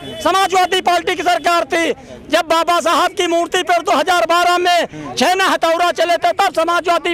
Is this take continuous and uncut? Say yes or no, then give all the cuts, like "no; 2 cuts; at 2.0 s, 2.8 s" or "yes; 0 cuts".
yes; 0 cuts